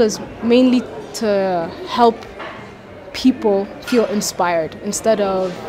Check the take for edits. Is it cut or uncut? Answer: uncut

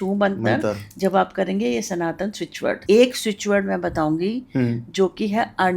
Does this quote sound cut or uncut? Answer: cut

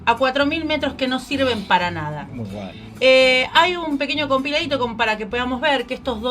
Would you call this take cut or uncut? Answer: uncut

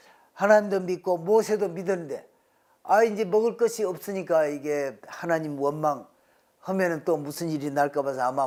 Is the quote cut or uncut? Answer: uncut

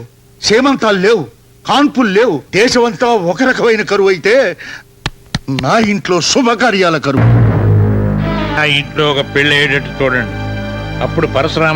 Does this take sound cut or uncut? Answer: cut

